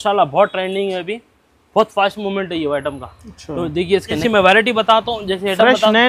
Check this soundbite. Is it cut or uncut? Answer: cut